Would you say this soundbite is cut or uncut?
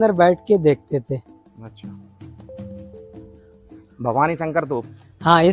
uncut